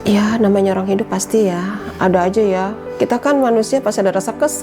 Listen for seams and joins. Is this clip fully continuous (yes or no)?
no